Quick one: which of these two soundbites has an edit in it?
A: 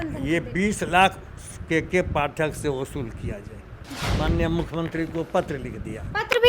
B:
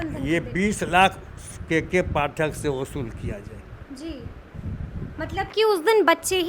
A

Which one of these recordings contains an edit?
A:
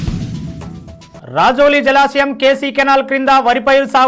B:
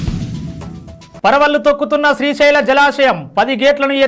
B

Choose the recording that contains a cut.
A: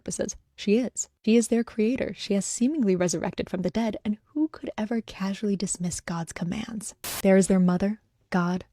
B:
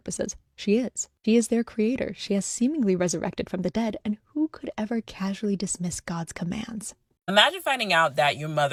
A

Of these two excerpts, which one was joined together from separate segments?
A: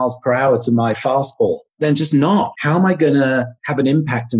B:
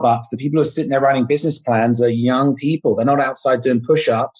A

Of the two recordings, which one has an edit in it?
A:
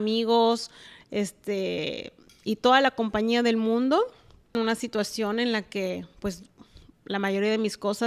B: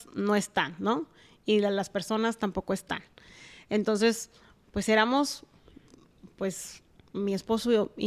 A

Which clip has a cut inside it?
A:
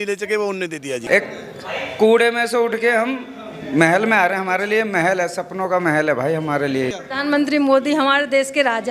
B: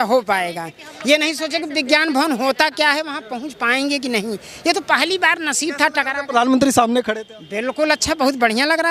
A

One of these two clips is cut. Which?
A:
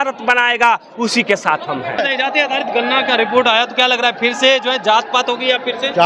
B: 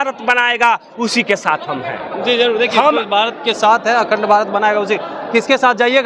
A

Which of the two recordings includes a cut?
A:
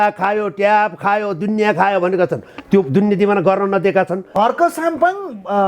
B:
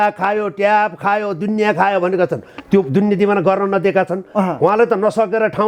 A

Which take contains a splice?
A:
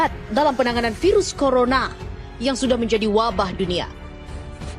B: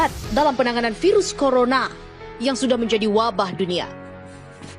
A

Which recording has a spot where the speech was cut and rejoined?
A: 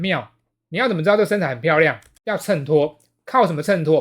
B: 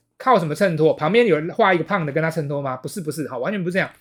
A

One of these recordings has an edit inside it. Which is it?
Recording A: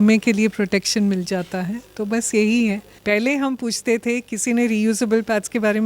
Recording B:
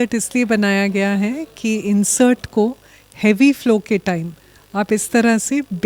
A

